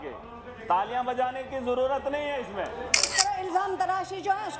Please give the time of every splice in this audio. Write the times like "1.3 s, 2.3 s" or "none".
3.1 s